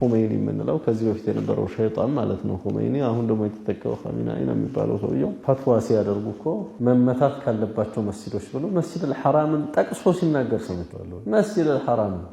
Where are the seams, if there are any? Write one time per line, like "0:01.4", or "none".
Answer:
0:05.4